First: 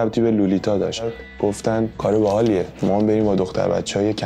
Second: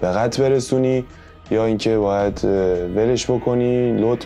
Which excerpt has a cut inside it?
first; 1 cut; at 1.2 s

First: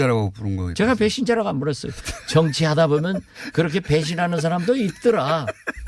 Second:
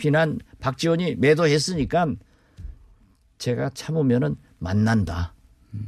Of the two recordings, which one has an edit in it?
first; 1 cut; at 4.2 s

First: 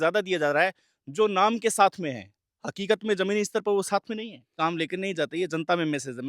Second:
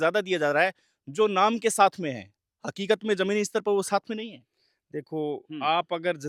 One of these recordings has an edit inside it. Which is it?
first; 1 cut; at 4.5 s

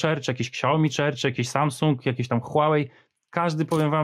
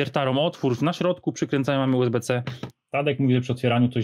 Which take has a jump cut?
second; 1 cut; at 2.6 s

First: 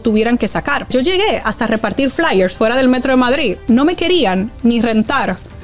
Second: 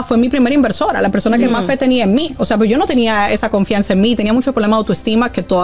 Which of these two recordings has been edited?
first; 2 cuts; at 0.9 s, 3.6 s

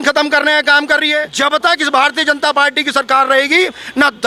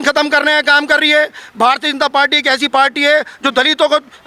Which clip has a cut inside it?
first; 1 cut; at 1.3 s

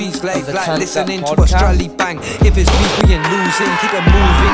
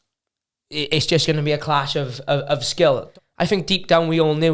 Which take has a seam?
second; 1 cut; at 3.0 s

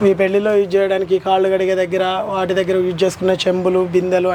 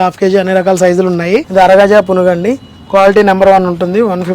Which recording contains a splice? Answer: second; 1 cut; at 1.5 s

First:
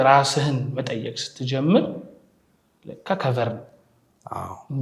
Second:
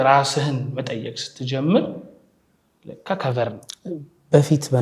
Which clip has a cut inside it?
second; 1 cut; at 3.7 s

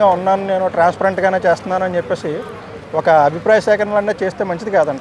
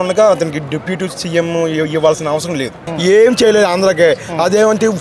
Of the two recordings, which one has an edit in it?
second; 1 cut; at 2.9 s

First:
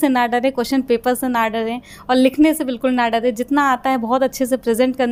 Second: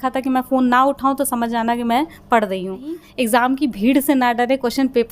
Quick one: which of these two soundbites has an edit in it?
second; 1 cut; at 3.0 s

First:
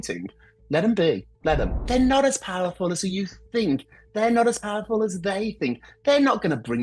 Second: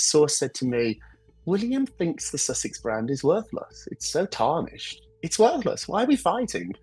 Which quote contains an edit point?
first; 1 cut; at 1.6 s

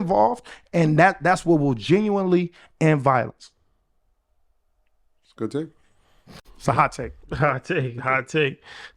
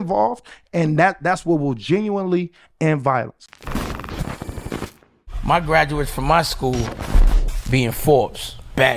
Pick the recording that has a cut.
second; 1 cut; at 3.5 s

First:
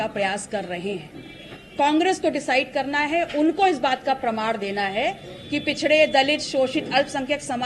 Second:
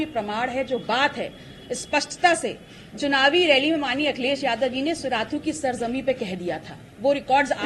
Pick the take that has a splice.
first; 1 cut; at 1.6 s

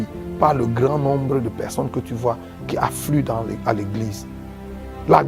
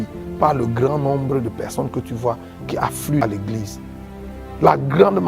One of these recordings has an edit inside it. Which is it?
second; 1 cut; at 3.2 s

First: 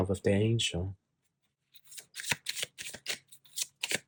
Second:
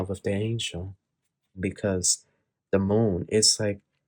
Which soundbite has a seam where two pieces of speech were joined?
second; 1 cut; at 1.6 s

